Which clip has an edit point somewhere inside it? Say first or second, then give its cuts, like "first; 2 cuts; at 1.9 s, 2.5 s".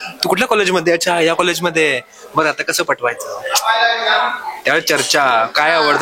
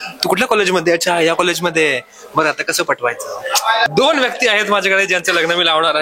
second; 1 cut; at 3.9 s